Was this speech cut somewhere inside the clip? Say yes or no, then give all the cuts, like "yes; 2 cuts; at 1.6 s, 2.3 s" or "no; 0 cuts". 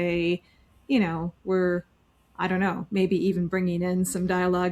no; 0 cuts